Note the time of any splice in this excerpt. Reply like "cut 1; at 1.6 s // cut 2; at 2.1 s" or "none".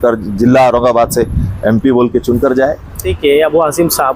cut 1; at 3.1 s